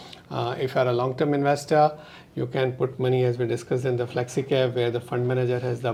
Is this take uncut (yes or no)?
yes